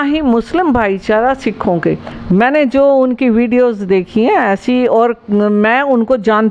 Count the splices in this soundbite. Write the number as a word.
one